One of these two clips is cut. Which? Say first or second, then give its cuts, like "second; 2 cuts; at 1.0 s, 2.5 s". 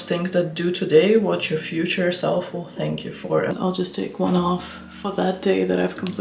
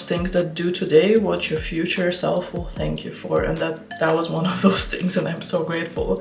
first; 1 cut; at 3.5 s